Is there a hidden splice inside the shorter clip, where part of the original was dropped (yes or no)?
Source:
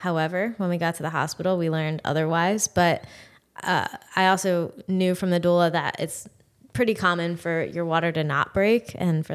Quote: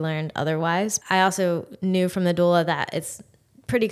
yes